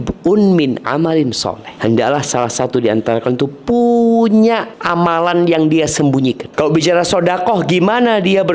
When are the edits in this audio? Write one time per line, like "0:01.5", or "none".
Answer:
0:01.7
0:04.8
0:06.4